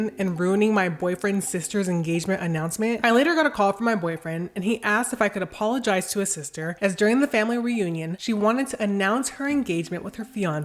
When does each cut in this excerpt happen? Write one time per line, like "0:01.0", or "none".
0:03.0

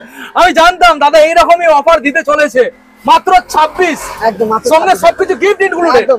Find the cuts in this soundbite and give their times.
none

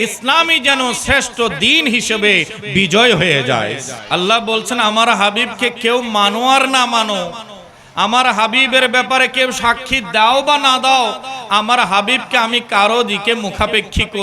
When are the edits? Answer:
0:03.9

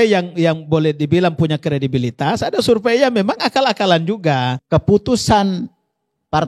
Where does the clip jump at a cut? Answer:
0:04.6

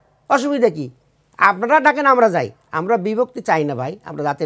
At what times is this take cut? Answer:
none

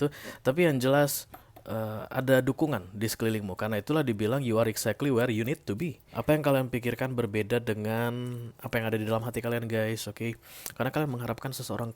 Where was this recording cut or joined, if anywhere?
0:06.1

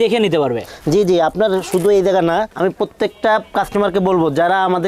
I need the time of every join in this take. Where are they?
none

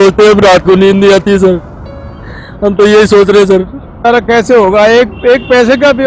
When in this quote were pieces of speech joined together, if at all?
0:04.1

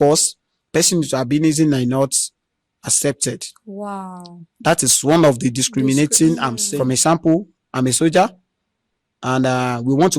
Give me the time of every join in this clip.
0:06.6

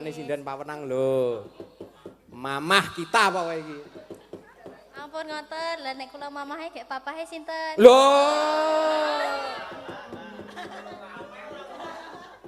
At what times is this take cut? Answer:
0:04.5

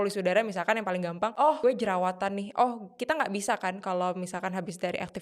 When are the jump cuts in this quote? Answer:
0:01.5

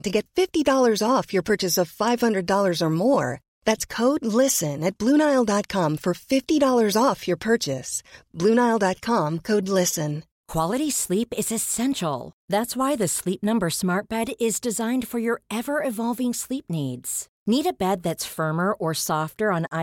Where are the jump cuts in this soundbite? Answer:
0:10.3

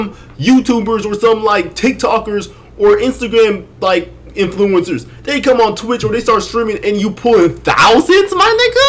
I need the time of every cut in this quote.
none

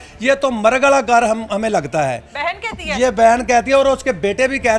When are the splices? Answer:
none

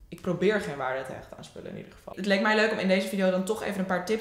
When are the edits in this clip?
0:02.1

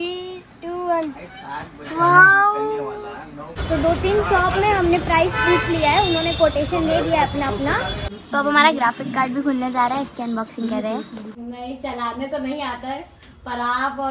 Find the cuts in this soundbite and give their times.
0:03.5
0:08.0
0:11.3

